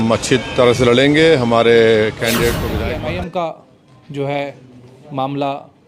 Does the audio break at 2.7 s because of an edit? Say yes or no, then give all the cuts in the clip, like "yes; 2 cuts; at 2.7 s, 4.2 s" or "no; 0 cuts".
yes; 1 cut; at 2.7 s